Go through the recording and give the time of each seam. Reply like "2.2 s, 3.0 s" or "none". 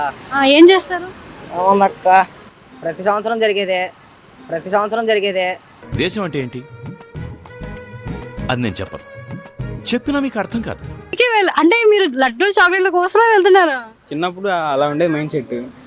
5.8 s, 11.1 s